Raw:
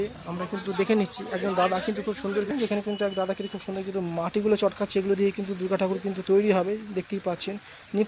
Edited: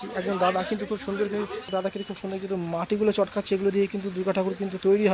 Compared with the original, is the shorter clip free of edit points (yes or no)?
no